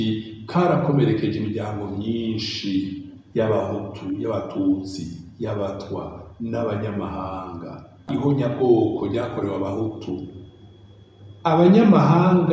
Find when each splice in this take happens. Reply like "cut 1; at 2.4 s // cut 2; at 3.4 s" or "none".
cut 1; at 8.0 s